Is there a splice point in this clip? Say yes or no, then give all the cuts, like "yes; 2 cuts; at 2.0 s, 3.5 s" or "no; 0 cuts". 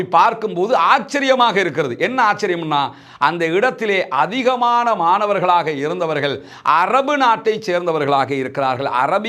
no; 0 cuts